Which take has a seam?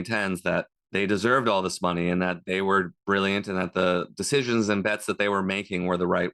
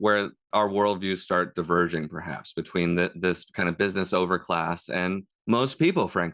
second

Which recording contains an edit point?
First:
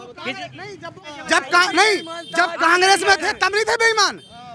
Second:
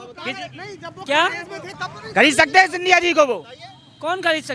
first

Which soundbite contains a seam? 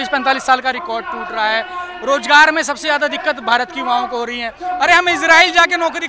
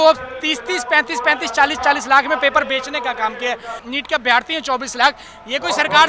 second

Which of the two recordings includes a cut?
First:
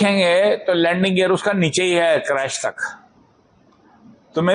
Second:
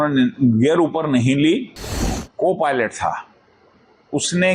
second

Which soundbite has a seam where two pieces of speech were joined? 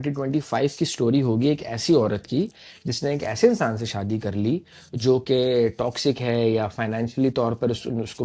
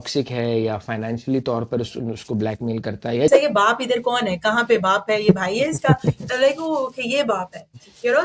second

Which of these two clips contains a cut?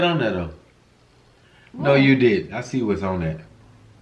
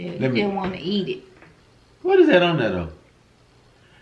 first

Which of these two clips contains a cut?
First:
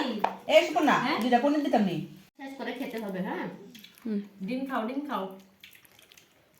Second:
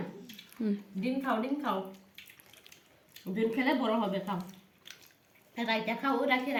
first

